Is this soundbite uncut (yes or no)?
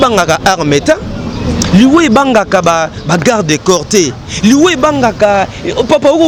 yes